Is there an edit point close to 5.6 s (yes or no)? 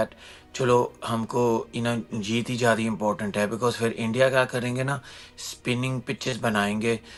no